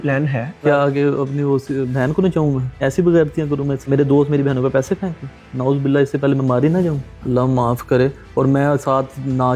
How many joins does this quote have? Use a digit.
0